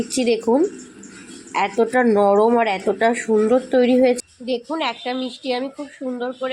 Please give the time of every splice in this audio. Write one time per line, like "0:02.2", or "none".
0:04.2